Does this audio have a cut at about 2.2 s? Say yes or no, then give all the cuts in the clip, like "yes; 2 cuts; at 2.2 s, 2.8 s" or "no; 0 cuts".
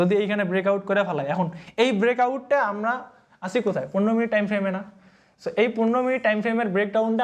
no; 0 cuts